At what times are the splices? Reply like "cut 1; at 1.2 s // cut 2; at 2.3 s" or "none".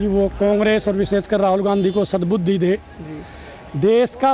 none